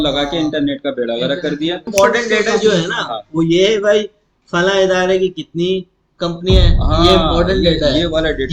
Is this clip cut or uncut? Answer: cut